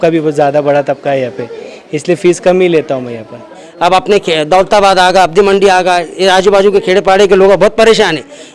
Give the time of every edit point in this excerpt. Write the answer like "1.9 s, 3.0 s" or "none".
3.6 s